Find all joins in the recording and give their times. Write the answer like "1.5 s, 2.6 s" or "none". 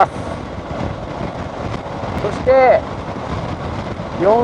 none

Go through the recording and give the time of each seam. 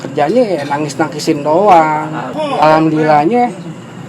2.3 s

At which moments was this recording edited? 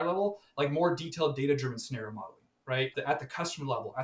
2.9 s

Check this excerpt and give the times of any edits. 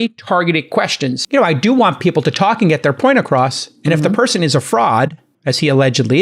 1.2 s

